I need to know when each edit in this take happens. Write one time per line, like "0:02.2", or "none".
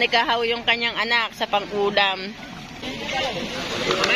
0:02.8